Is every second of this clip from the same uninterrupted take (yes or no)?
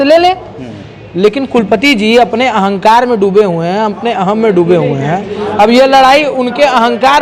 yes